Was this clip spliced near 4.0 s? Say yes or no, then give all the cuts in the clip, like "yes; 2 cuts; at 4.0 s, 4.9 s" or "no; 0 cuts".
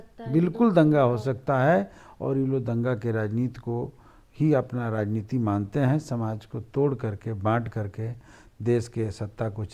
no; 0 cuts